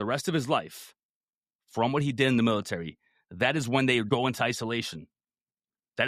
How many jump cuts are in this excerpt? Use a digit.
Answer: 1